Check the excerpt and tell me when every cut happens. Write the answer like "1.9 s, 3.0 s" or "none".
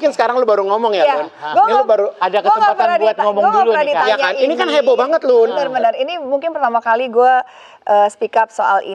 none